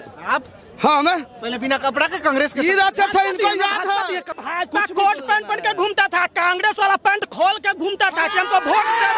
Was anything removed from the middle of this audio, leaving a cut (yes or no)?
yes